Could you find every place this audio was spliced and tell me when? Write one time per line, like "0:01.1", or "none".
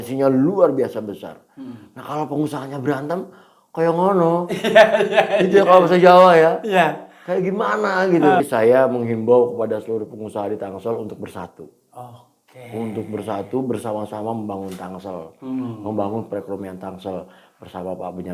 0:08.4